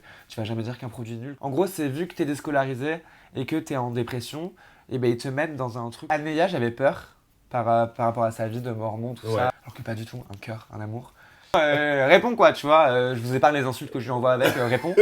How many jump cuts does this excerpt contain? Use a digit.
4